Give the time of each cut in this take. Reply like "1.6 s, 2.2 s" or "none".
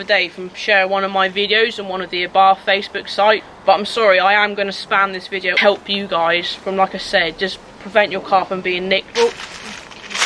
3.5 s, 5.5 s, 9.1 s

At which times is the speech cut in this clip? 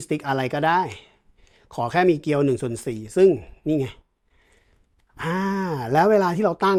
none

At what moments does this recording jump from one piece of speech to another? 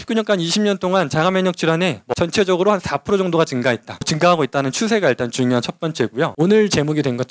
2.0 s, 4.1 s, 6.3 s

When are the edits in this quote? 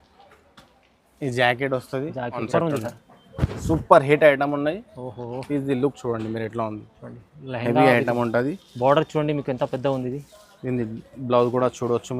2.4 s

